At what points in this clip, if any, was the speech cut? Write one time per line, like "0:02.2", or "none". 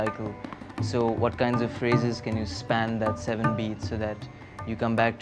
none